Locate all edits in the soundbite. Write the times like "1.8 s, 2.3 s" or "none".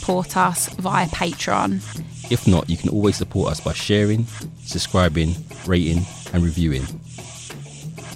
6.9 s